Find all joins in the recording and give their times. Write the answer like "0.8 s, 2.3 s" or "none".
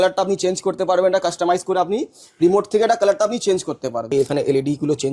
4.1 s